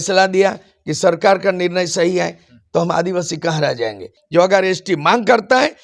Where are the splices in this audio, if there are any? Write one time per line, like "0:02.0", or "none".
0:04.1